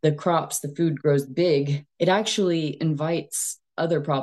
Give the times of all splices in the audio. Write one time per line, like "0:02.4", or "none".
0:01.8